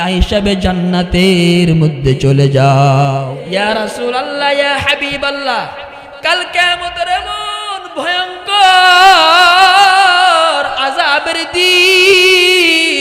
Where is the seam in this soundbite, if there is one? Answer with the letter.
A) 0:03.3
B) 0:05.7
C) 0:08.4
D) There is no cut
A